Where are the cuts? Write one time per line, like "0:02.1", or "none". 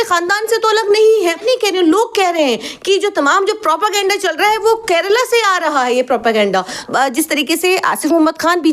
0:01.4
0:06.8